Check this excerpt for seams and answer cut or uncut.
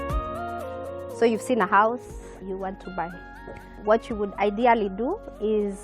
cut